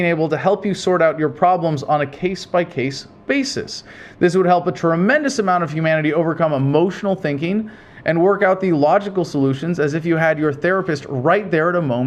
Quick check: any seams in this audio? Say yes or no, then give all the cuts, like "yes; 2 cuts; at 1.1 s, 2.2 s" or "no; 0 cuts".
no; 0 cuts